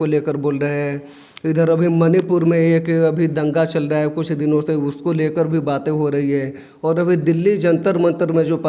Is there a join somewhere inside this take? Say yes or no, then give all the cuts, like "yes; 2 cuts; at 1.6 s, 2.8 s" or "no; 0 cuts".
no; 0 cuts